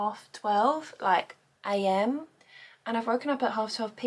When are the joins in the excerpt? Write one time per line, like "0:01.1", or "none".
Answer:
none